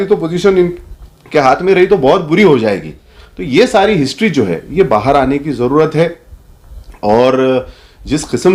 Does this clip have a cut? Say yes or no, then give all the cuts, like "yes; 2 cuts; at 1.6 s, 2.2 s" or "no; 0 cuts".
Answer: no; 0 cuts